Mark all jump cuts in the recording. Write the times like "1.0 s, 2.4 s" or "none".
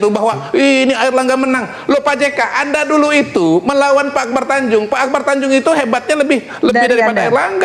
none